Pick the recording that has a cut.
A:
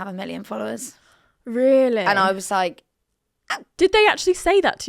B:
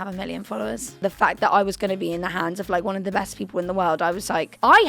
B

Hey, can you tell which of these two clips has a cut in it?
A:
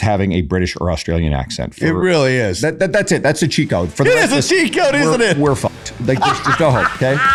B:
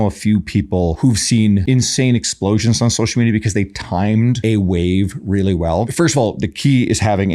B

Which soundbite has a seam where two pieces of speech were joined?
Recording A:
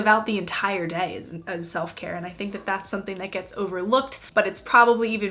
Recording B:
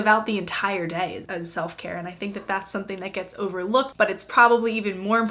B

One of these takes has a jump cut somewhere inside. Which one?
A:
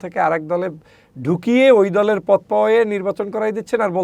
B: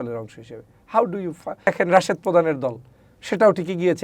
B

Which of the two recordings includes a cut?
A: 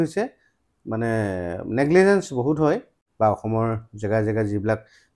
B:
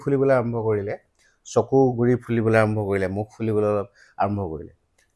A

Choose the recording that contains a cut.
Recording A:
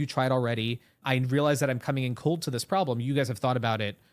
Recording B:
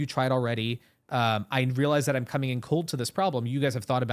A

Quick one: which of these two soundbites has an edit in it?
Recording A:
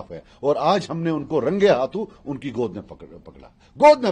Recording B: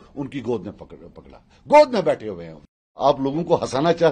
B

